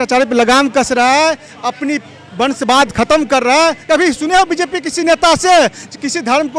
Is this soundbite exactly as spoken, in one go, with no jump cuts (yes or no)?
no